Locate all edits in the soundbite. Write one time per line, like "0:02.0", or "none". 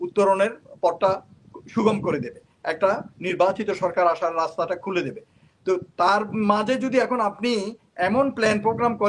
none